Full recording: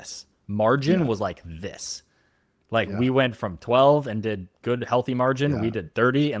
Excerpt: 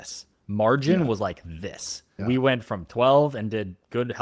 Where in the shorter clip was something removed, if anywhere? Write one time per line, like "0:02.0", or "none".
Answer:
0:02.2